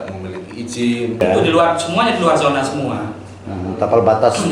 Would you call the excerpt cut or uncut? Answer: cut